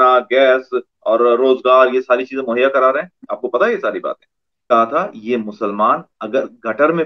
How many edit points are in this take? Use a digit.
1